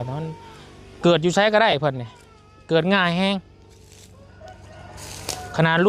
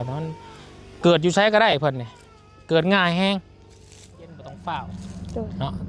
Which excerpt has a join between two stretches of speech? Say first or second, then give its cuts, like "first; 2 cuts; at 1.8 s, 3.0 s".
second; 1 cut; at 4.5 s